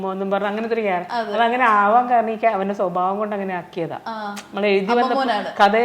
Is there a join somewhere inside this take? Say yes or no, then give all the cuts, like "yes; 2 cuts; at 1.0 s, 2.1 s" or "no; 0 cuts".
no; 0 cuts